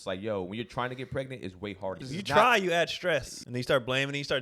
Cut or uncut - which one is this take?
cut